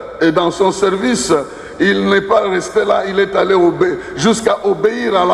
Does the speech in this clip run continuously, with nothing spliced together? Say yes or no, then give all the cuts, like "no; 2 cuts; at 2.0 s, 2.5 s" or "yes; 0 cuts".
yes; 0 cuts